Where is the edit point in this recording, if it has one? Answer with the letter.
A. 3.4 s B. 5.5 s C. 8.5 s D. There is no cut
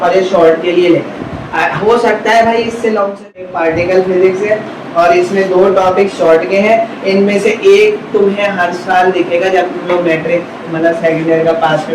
A